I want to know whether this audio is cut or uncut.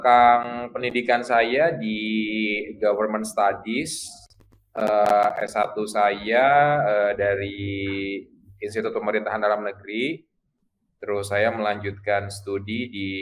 uncut